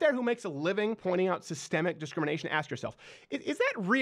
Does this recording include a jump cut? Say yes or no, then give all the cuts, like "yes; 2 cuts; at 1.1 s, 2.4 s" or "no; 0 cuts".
yes; 1 cut; at 1.0 s